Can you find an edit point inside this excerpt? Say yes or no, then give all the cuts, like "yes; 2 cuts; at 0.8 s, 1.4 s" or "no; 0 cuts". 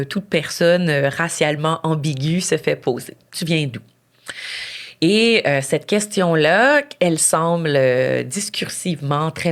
no; 0 cuts